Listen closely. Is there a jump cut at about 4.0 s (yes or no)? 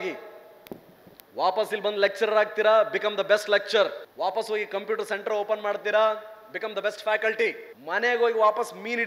yes